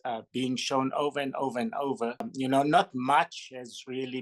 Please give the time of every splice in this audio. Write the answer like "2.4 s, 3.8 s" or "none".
2.3 s